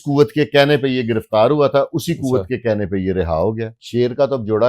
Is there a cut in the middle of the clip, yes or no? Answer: yes